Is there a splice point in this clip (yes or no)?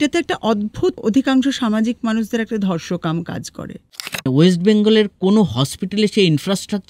yes